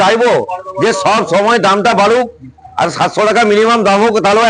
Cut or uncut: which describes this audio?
uncut